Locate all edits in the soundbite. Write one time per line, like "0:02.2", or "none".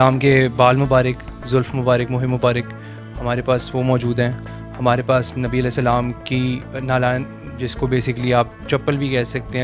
0:04.5
0:08.6